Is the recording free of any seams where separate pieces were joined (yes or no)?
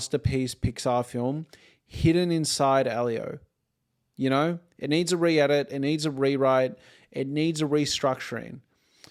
yes